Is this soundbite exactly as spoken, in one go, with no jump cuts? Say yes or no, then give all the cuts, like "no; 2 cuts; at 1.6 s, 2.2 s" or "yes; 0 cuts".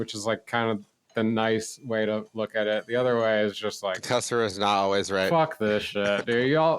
no; 2 cuts; at 1.1 s, 2.3 s